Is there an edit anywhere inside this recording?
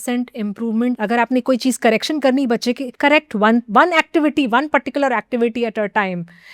yes; 2 cuts; at 1.0 s, 2.9 s

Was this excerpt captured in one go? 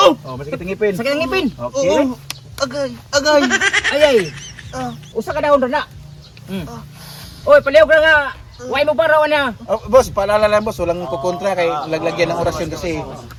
yes; 0 cuts

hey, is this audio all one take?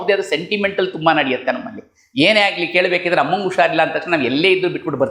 yes; 0 cuts

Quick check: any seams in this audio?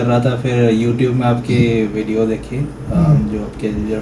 no; 0 cuts

